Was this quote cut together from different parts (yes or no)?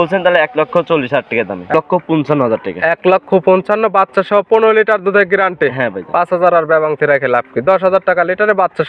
yes